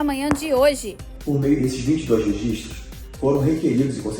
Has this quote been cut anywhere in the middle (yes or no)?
yes